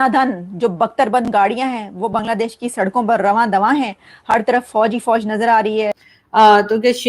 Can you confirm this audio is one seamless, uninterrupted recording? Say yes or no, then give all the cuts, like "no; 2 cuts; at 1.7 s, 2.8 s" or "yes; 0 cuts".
no; 1 cut; at 5.9 s